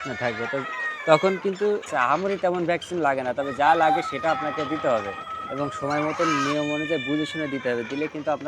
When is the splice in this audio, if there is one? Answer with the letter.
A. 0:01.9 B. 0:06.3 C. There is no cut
A